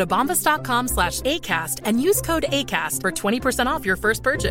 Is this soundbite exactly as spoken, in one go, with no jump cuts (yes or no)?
yes